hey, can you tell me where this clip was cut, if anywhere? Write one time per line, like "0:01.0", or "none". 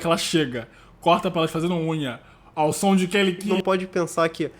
0:03.4